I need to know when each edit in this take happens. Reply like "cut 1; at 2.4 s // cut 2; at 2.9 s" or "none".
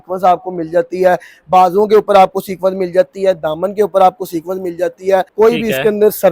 cut 1; at 5.3 s